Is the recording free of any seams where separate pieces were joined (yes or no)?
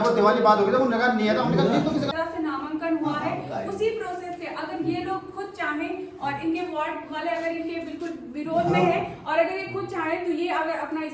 no